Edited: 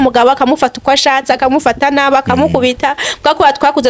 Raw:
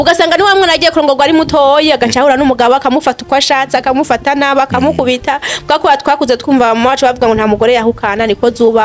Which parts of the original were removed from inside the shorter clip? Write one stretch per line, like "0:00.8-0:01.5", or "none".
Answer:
none

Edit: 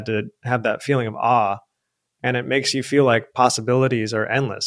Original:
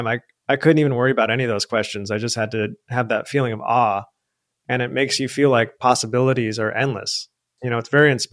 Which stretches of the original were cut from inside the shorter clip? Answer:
none

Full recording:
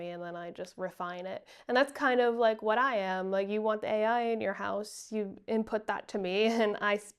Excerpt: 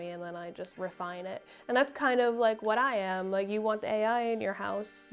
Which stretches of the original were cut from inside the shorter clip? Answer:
none

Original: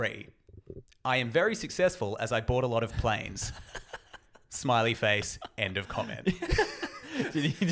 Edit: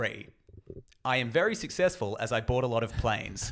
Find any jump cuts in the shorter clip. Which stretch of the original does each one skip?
none

